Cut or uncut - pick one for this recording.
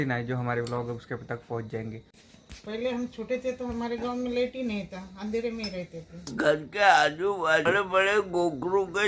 cut